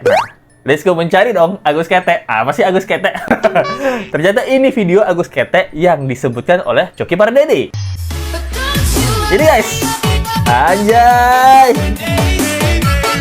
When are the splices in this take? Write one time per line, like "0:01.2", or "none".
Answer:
none